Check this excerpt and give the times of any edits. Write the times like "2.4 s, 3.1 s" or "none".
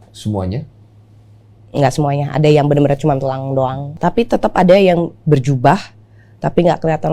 3.9 s

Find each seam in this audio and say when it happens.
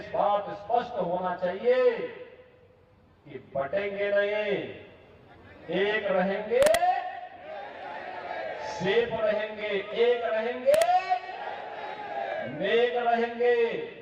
none

